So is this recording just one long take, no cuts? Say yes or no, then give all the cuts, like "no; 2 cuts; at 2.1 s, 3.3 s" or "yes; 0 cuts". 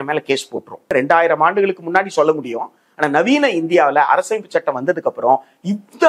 no; 1 cut; at 0.9 s